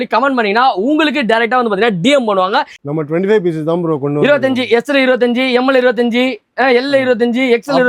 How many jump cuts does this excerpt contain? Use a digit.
1